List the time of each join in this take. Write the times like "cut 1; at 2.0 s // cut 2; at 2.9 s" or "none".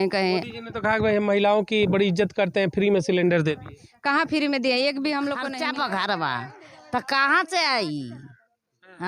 cut 1; at 5.4 s